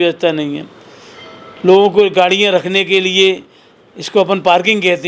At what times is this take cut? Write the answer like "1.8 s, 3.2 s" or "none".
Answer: none

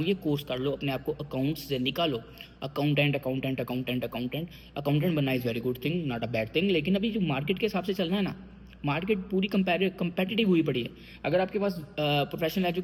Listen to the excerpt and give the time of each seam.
none

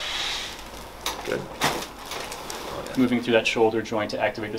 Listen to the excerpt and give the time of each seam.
2.9 s

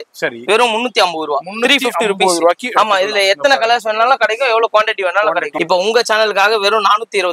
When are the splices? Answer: 5.5 s

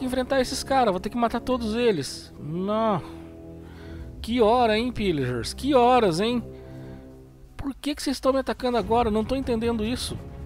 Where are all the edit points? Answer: none

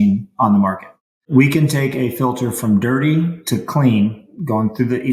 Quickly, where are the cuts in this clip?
1.2 s

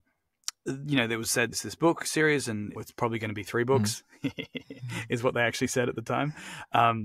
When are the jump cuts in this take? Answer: 1.5 s, 2.8 s

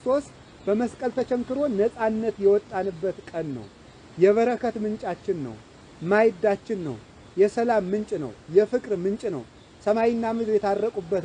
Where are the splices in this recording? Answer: none

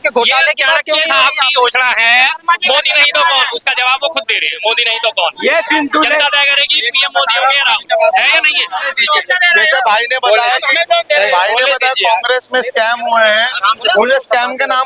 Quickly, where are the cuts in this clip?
8.9 s

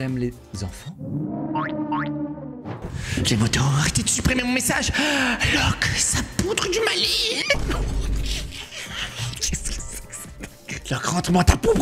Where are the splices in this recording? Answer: 2.4 s

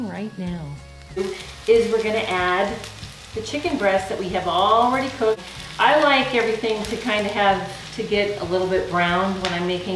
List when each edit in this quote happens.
none

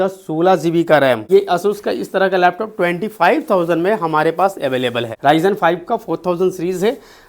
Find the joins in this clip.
1.2 s, 5.1 s

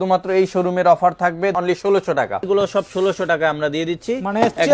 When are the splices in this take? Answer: 1.5 s, 2.5 s

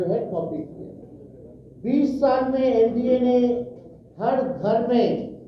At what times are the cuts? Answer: 1.0 s

